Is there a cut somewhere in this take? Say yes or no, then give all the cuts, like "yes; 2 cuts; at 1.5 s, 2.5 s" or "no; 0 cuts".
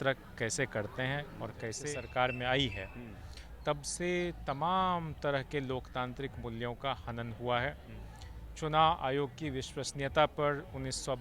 yes; 1 cut; at 1.8 s